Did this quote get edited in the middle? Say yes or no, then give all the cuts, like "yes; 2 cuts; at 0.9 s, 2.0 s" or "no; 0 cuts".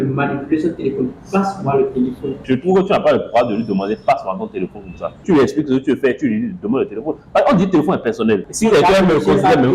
yes; 3 cuts; at 2.4 s, 5.2 s, 8.5 s